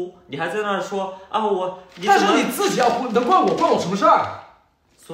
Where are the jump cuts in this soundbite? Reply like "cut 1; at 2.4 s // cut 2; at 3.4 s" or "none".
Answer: none

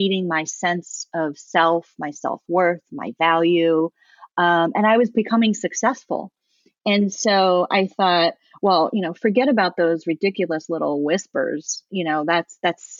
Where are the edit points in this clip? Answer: none

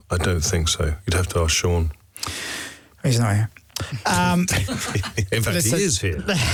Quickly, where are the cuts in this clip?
none

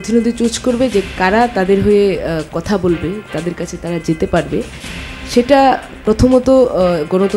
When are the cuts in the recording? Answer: none

